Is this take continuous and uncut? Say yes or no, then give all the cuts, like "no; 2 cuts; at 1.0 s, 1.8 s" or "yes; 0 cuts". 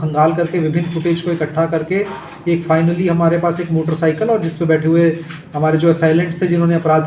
yes; 0 cuts